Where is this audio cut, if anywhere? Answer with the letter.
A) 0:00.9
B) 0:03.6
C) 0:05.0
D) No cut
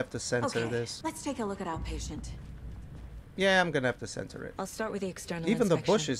A